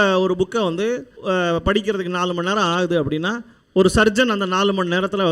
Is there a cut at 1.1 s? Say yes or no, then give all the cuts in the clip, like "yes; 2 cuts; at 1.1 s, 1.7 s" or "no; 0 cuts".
yes; 1 cut; at 1.1 s